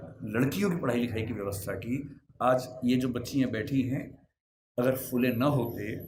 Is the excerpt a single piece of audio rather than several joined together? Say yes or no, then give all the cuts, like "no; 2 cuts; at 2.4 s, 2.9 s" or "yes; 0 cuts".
yes; 0 cuts